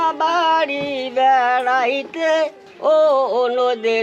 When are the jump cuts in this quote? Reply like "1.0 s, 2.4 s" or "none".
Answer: 2.6 s